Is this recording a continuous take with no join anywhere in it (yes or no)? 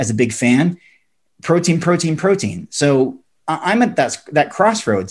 yes